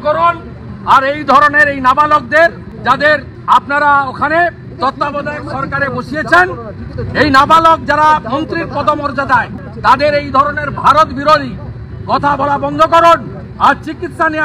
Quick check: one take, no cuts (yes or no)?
no